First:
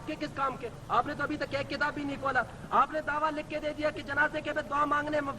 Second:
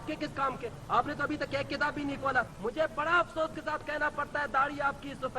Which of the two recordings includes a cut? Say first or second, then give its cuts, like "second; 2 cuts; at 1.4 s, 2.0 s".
second; 1 cut; at 2.5 s